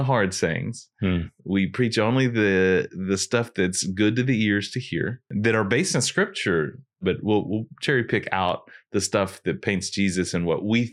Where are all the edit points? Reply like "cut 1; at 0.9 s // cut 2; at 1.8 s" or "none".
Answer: cut 1; at 5.2 s // cut 2; at 7.0 s